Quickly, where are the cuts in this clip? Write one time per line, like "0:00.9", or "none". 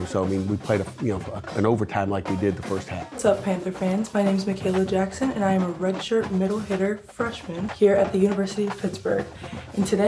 0:03.2
0:07.7